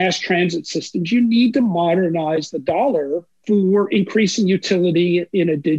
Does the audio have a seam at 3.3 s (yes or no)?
yes